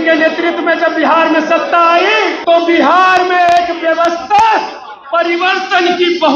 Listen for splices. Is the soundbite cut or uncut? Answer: cut